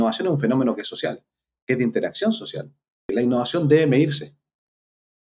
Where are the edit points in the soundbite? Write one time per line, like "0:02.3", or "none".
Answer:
0:03.1